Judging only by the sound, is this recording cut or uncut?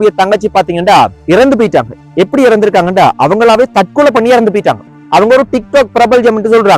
cut